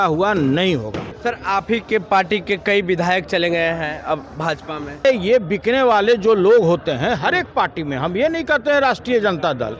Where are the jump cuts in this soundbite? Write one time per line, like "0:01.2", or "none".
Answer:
0:01.1
0:05.1